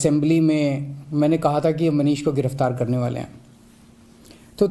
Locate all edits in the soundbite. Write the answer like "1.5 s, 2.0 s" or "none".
1.3 s